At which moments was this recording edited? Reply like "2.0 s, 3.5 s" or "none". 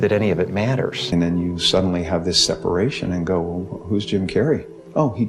1.0 s